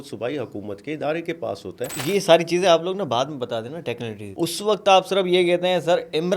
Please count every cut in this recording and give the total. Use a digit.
2